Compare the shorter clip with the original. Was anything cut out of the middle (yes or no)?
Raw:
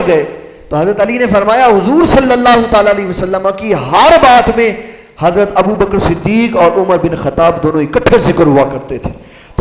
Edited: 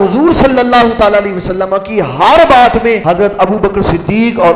yes